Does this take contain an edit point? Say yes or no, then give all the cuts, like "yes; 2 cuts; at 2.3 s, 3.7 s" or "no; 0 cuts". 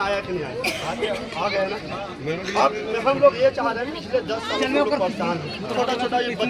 no; 0 cuts